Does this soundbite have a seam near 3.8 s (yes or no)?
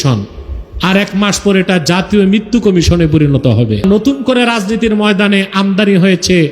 yes